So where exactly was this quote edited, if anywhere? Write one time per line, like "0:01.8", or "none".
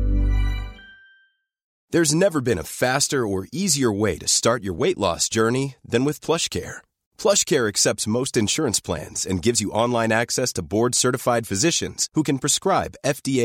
0:01.7